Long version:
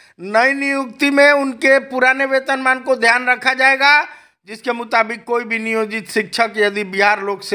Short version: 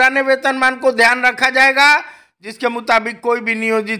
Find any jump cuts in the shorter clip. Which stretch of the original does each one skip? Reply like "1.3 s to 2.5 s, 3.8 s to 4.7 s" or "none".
none